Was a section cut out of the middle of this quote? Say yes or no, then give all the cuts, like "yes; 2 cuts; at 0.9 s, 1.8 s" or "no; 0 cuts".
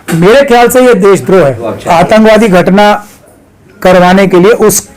yes; 1 cut; at 1.7 s